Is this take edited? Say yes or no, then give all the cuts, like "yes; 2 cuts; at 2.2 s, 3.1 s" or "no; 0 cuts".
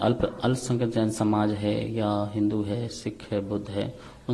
no; 0 cuts